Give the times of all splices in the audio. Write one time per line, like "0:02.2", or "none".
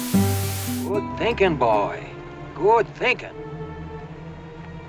0:01.1